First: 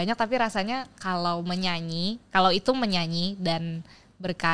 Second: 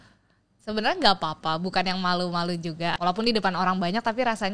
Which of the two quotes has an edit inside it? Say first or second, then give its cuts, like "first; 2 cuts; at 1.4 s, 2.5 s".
second; 1 cut; at 3.0 s